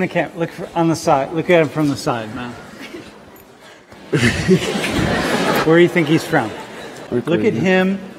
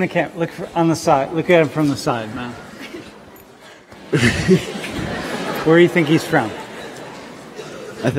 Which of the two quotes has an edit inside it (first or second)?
first